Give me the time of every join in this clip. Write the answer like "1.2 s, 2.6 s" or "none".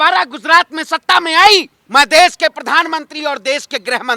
1.8 s